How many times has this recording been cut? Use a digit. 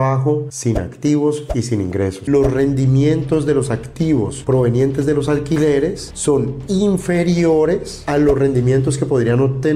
1